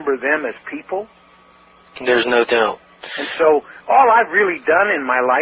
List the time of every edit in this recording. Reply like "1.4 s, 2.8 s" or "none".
none